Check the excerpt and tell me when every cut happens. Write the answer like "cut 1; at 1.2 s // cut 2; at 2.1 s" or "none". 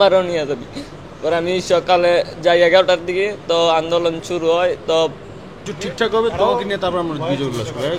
cut 1; at 5.6 s